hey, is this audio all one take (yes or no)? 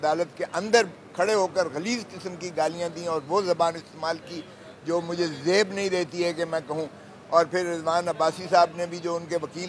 yes